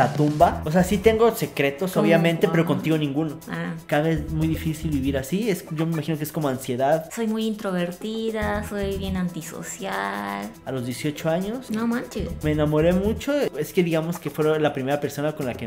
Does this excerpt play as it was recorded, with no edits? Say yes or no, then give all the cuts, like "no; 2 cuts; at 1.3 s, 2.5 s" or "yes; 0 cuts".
no; 3 cuts; at 3.8 s, 7.1 s, 10.6 s